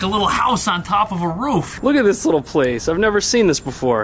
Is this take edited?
yes; 1 cut; at 1.7 s

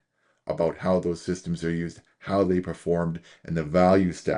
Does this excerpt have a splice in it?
no; 0 cuts

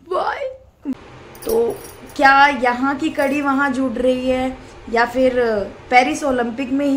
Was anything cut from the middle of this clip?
yes; 1 cut; at 1.0 s

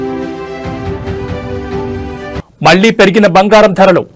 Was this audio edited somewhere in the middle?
no; 0 cuts

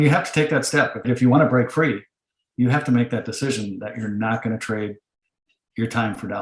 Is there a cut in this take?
yes; 1 cut; at 1.0 s

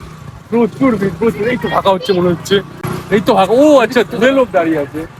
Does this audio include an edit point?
no; 0 cuts

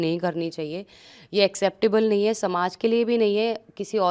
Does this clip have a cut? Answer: no; 0 cuts

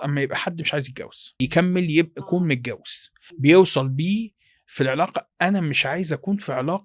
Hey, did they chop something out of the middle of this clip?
yes; 2 cuts; at 1.4 s, 3.4 s

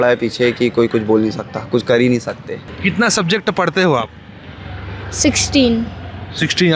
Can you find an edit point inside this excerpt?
yes; 1 cut; at 2.7 s

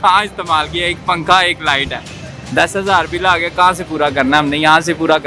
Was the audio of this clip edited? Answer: no; 0 cuts

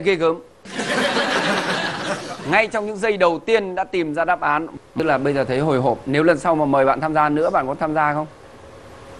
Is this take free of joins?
no; 1 cut; at 4.8 s

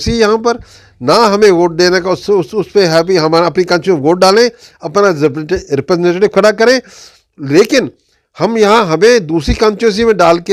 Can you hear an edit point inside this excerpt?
no; 0 cuts

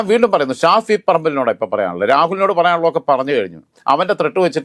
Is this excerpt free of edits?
no; 1 cut; at 3.7 s

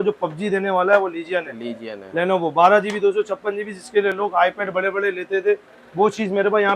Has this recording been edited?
no; 0 cuts

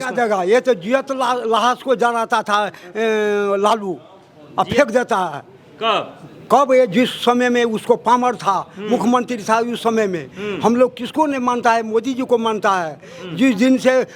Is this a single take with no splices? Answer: yes; 0 cuts

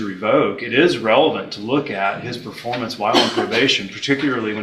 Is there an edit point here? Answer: no; 0 cuts

